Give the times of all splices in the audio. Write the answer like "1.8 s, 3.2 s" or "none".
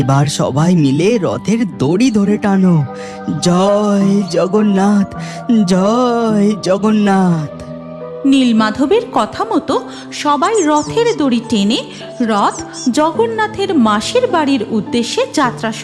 none